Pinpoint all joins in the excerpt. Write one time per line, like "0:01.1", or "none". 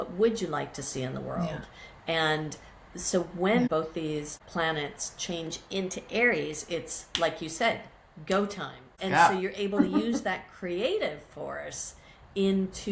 none